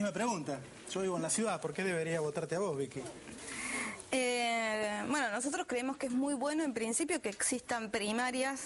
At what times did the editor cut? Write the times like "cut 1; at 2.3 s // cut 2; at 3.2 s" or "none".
none